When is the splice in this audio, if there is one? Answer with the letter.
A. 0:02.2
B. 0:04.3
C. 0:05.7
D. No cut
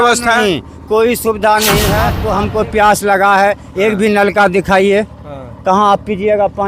A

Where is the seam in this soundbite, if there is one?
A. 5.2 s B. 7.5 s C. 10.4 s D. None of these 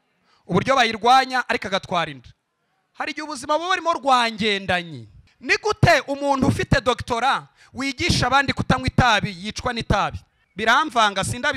D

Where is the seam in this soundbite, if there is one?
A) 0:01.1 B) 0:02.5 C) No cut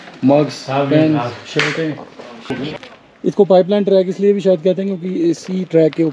B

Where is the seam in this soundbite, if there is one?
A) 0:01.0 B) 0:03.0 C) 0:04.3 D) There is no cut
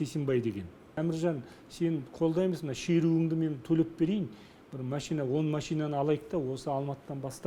A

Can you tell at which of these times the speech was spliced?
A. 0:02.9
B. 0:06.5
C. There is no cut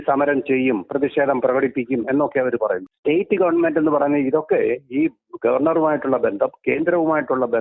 A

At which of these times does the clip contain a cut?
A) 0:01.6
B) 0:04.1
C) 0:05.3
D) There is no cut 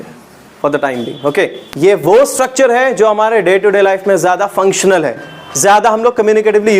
A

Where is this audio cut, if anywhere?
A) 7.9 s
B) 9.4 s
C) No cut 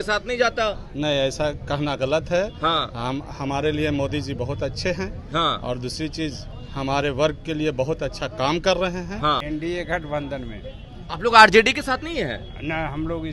B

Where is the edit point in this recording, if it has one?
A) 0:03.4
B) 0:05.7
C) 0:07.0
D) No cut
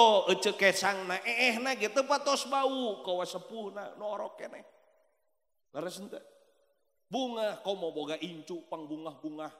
D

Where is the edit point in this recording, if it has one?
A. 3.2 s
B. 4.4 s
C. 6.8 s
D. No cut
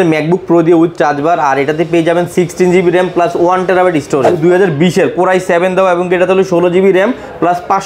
B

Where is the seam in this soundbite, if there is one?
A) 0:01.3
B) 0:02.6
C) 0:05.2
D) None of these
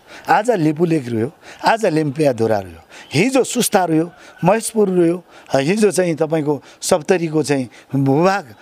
D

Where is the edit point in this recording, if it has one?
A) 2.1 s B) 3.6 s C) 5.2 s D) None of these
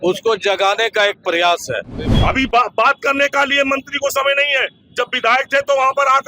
A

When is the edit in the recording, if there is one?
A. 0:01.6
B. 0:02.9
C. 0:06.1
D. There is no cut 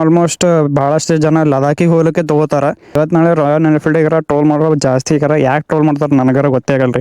B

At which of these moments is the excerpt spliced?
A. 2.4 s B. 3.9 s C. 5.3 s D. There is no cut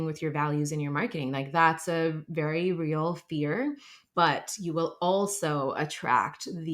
B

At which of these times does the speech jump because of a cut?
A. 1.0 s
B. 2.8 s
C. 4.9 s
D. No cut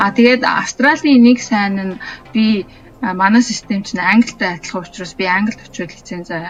D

